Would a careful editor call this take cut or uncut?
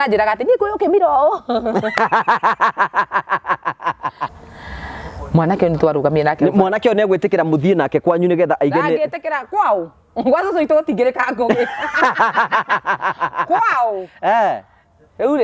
cut